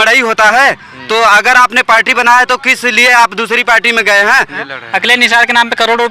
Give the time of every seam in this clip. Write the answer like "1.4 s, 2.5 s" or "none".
4.6 s